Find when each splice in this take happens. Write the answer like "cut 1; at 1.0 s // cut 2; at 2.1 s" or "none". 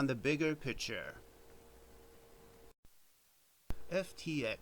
cut 1; at 2.7 s